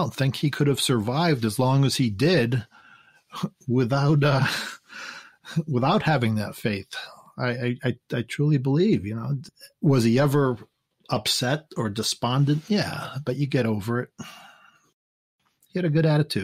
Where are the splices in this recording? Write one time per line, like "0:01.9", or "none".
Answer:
0:15.0